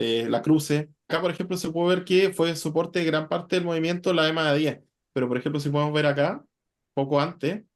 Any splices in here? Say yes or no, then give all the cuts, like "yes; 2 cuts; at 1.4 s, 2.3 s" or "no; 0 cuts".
yes; 1 cut; at 1.1 s